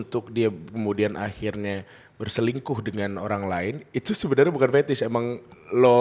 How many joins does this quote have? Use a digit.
0